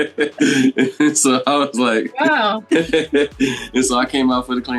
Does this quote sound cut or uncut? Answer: uncut